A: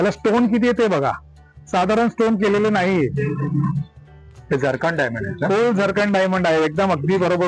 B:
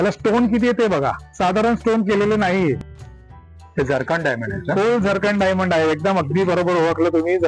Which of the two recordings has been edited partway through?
B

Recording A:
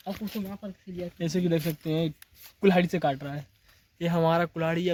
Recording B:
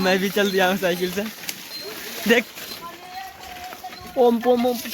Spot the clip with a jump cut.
B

